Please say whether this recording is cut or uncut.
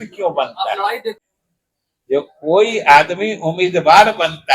cut